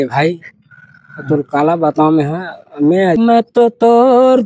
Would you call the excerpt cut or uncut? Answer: cut